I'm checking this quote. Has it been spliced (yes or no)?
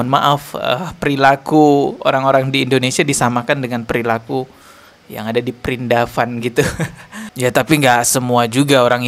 no